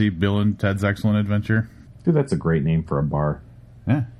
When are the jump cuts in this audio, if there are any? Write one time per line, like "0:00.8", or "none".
0:01.8